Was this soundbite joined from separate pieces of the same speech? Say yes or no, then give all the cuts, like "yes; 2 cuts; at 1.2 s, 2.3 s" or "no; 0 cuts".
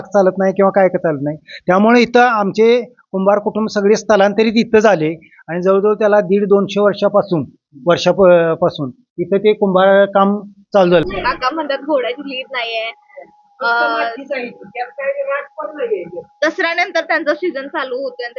yes; 1 cut; at 11.0 s